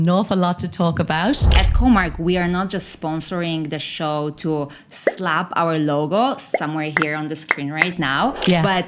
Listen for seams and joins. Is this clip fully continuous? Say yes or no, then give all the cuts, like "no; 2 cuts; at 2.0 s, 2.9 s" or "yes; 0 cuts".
no; 1 cut; at 1.5 s